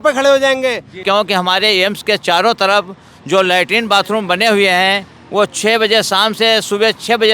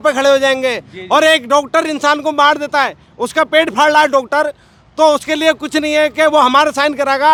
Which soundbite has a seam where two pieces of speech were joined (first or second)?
first